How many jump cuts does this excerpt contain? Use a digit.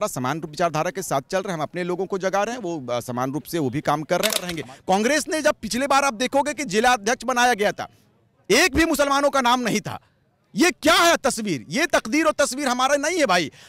1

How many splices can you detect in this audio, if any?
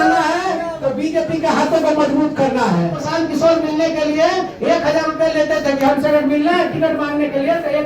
1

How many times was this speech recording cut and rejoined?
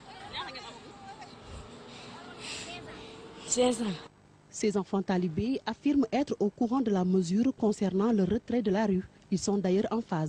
1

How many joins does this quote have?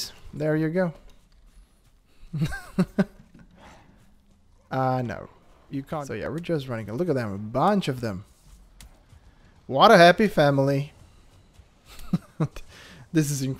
1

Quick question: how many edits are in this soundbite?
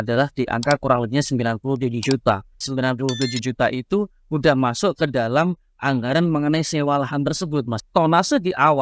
2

